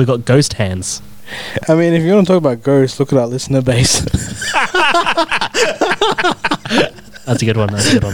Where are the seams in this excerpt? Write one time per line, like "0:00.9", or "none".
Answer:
0:07.0